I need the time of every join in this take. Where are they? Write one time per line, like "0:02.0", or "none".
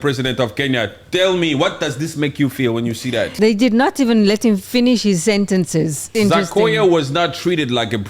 0:03.3
0:06.1